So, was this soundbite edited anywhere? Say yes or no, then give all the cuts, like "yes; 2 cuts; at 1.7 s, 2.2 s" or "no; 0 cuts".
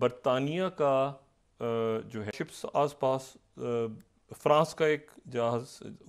yes; 1 cut; at 2.3 s